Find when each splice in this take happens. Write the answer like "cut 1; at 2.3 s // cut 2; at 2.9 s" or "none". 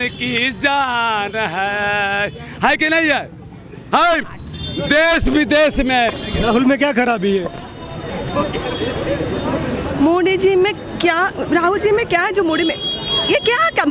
cut 1; at 6.2 s